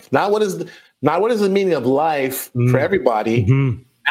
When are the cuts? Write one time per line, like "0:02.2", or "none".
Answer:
none